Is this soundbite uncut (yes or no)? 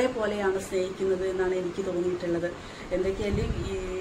yes